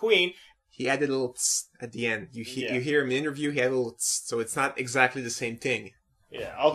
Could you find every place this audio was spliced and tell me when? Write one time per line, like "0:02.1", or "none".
0:01.4